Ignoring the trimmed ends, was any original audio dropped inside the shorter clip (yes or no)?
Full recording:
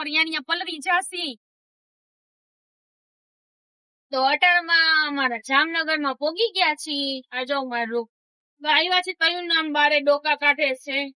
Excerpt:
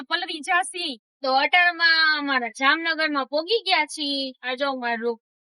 yes